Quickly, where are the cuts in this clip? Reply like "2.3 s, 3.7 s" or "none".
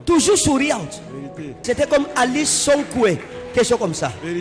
1.6 s